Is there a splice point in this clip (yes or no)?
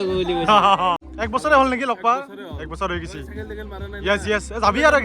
yes